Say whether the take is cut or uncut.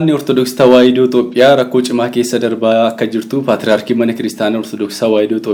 uncut